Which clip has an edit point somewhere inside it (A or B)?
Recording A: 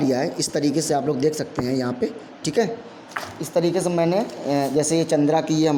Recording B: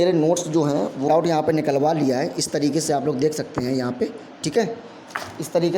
B